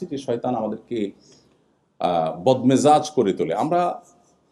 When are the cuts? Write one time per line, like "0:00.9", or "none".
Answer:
none